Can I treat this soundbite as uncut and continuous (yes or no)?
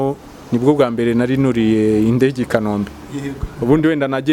yes